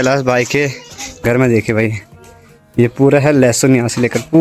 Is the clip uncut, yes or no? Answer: yes